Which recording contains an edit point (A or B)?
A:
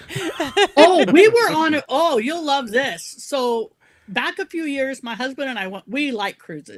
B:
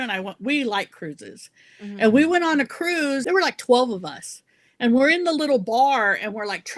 B